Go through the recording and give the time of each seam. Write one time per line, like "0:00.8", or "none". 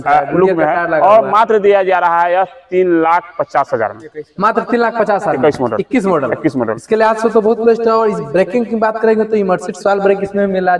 none